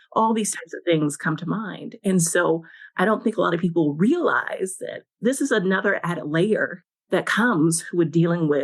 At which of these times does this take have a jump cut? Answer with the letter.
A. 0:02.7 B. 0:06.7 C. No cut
B